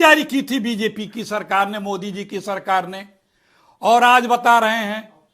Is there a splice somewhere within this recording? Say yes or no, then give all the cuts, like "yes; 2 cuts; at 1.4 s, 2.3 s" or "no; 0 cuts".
yes; 1 cut; at 3.6 s